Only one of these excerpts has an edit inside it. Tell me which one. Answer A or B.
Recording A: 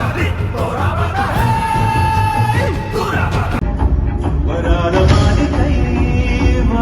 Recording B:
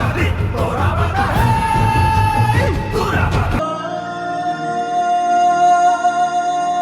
A